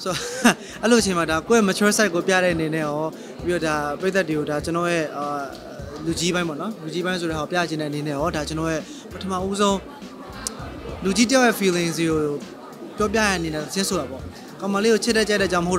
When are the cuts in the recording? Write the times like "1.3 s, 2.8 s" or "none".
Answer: 1.4 s